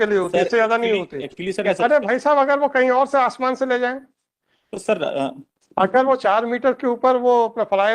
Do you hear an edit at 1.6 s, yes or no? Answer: yes